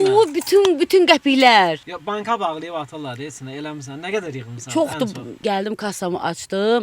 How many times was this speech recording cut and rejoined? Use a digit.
1